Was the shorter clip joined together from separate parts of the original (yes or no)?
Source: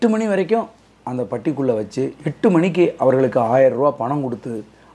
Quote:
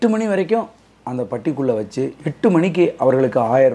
no